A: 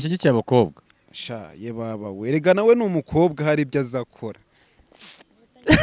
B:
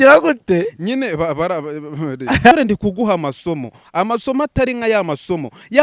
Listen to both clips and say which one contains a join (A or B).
B